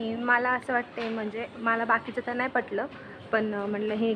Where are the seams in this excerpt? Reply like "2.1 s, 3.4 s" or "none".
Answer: none

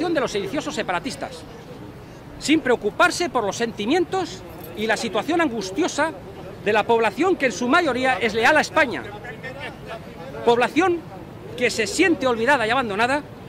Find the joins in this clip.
8.0 s

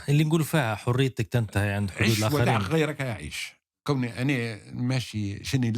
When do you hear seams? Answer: 3.7 s

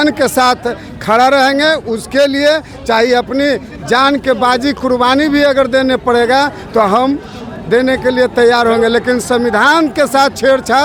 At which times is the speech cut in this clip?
none

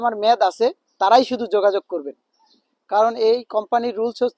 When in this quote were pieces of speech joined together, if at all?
none

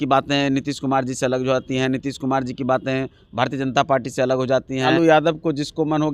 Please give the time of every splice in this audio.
4.9 s

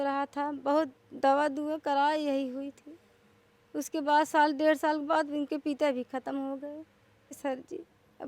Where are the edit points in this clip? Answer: 7.4 s

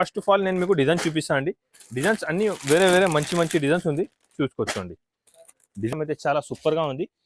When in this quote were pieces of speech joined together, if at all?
5.9 s

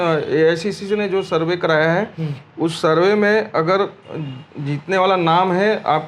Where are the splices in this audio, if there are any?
none

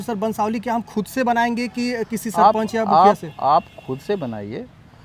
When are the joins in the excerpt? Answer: none

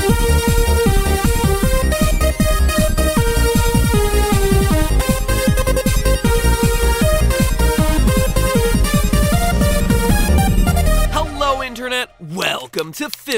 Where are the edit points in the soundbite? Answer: 12.2 s

